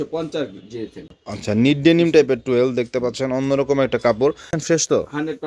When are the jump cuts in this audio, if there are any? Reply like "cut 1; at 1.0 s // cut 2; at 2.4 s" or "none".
cut 1; at 1.2 s // cut 2; at 4.5 s